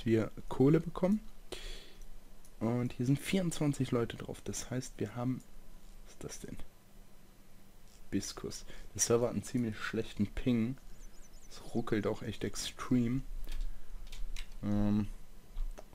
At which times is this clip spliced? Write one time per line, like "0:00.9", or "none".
0:02.7